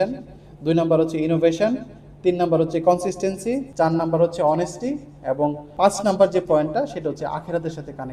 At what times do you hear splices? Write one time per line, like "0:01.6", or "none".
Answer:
none